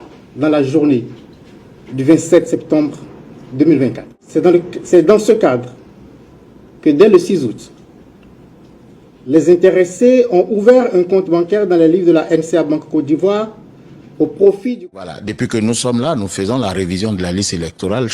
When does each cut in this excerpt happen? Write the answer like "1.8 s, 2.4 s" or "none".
4.1 s, 14.8 s